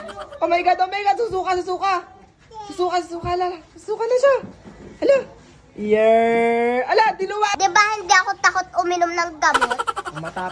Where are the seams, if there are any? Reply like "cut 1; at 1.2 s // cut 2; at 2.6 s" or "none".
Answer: cut 1; at 7.5 s